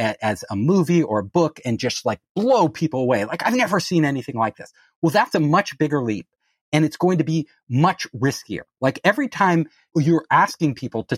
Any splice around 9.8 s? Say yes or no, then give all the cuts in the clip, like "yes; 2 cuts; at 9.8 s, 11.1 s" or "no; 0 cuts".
yes; 1 cut; at 9.8 s